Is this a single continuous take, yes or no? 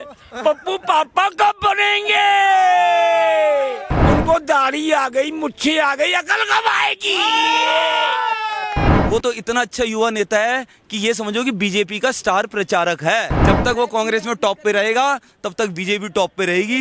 no